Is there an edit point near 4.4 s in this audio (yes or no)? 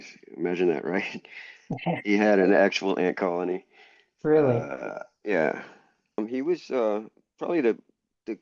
no